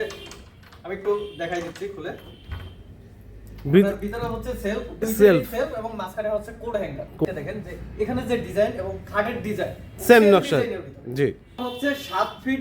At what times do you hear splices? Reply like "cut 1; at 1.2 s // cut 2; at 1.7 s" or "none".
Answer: cut 1; at 7.2 s // cut 2; at 11.5 s